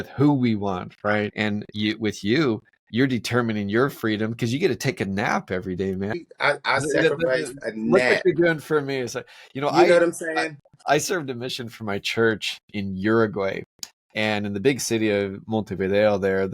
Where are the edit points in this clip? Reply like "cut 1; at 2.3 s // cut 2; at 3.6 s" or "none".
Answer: cut 1; at 1.3 s // cut 2; at 6.2 s